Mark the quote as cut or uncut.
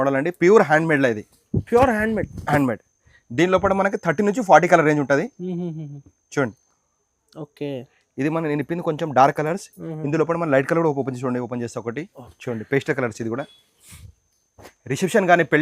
uncut